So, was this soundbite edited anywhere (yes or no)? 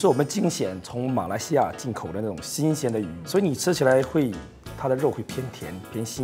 yes